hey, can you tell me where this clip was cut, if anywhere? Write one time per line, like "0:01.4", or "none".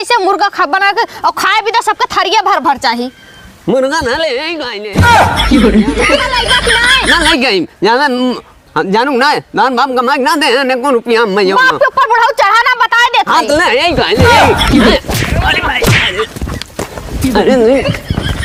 none